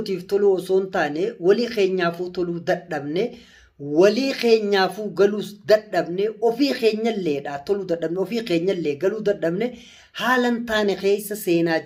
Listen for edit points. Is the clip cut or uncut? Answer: uncut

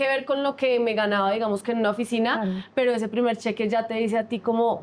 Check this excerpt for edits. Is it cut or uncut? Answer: uncut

